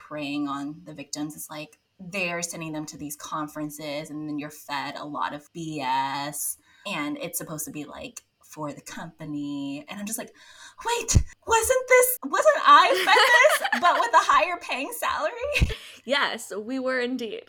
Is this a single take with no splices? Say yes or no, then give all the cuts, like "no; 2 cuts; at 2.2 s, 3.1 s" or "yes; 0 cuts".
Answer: no; 1 cut; at 15.9 s